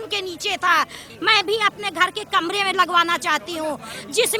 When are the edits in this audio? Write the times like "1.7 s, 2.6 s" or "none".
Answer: 1.0 s